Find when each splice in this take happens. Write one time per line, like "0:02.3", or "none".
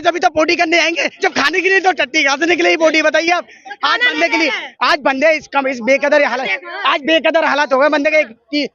none